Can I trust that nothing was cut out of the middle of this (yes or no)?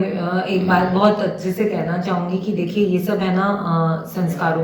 yes